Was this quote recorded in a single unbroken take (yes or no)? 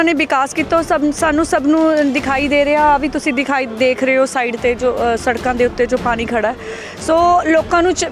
yes